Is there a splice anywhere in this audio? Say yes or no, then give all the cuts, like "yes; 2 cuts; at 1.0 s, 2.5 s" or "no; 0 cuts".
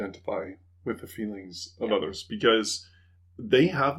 no; 0 cuts